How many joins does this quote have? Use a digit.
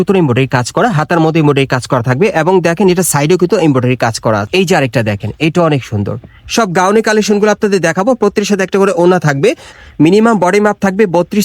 2